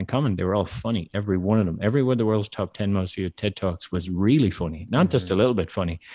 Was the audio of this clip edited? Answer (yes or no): no